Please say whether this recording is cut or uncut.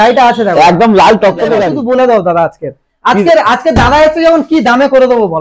cut